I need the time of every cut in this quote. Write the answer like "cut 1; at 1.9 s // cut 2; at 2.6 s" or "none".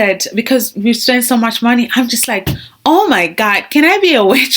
none